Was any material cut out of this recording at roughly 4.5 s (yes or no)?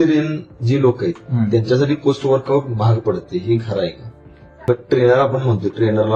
yes